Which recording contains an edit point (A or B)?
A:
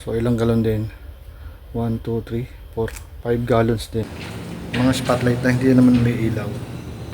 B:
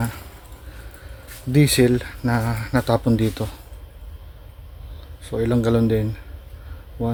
A